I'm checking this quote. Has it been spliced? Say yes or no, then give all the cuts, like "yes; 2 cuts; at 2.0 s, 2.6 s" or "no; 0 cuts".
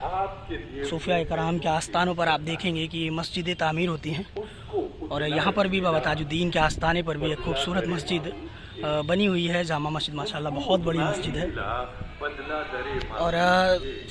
no; 0 cuts